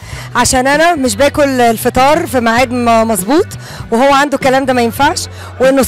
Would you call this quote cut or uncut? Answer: uncut